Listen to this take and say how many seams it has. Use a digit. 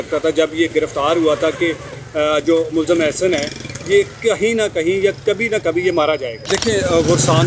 1